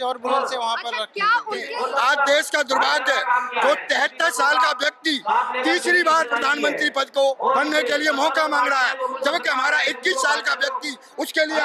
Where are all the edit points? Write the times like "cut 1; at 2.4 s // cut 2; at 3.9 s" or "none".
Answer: cut 1; at 1.6 s // cut 2; at 7.4 s

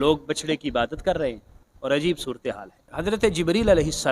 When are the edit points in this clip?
cut 1; at 2.9 s

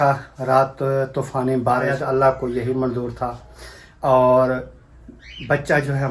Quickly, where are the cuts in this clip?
cut 1; at 2.0 s

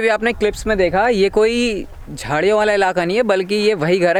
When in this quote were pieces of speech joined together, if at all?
none

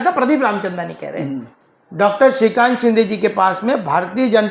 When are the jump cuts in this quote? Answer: cut 1; at 1.6 s

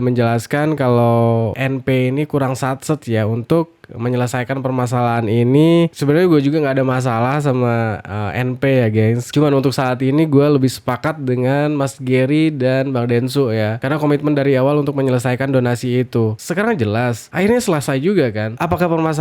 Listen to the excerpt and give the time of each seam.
cut 1; at 1.5 s

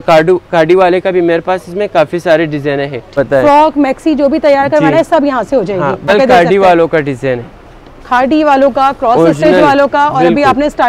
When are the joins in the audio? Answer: cut 1; at 3.1 s // cut 2; at 6.1 s

